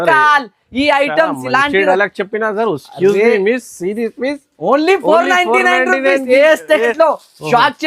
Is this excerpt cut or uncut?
cut